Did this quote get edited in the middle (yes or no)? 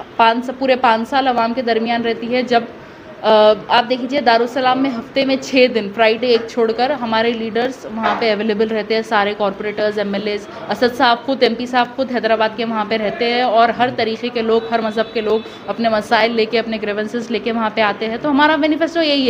no